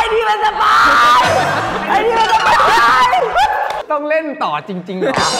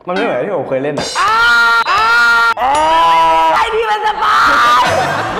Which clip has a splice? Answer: first; 1 cut; at 3.8 s

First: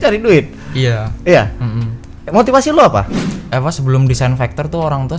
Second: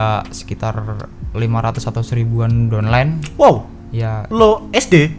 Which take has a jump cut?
first; 1 cut; at 3.3 s

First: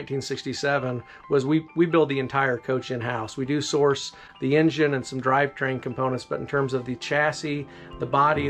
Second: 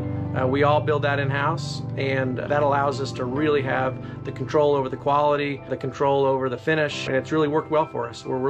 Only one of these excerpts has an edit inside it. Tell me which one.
second; 3 cuts; at 2.4 s, 5.8 s, 7.0 s

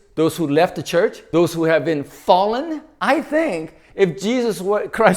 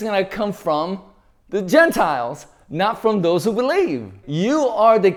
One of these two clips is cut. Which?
first; 2 cuts; at 1.2 s, 2.8 s

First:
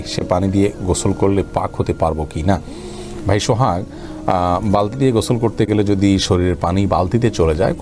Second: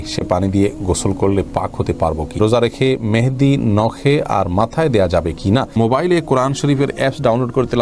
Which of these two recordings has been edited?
second; 2 cuts; at 2.4 s, 5.8 s

